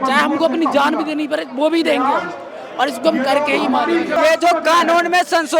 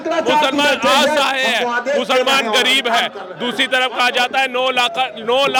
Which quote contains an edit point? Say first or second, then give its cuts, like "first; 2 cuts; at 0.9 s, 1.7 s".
first; 1 cut; at 4.1 s